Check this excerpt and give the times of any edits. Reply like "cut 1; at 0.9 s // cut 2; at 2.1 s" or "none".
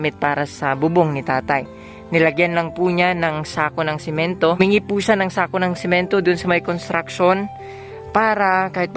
cut 1; at 4.6 s